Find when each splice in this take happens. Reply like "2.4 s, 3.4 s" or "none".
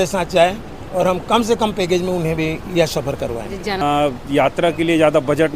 3.8 s